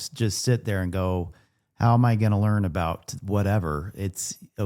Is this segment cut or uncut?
uncut